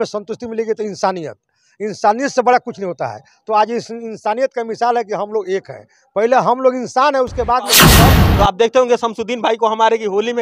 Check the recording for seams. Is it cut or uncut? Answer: cut